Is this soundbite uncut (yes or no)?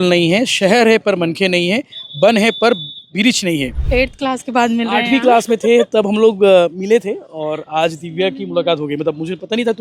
no